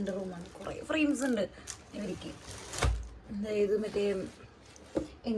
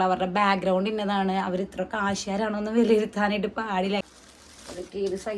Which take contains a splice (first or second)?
second